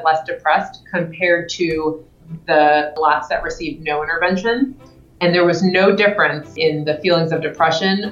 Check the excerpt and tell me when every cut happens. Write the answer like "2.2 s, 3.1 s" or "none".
2.9 s, 6.5 s